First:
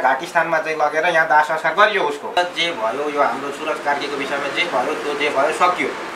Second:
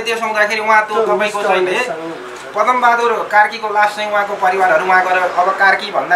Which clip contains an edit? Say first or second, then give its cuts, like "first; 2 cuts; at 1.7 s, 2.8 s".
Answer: first; 1 cut; at 2.4 s